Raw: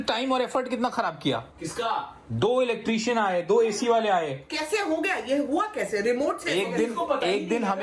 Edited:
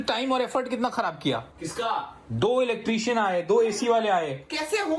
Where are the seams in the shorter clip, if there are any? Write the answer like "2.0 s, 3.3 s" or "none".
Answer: none